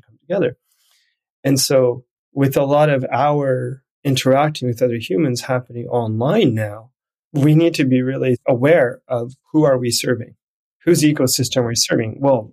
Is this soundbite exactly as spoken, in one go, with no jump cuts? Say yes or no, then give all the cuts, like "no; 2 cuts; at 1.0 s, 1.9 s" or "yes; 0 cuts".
yes; 0 cuts